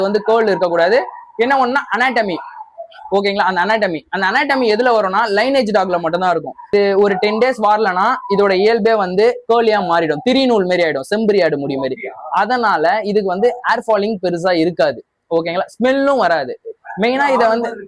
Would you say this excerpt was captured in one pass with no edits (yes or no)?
no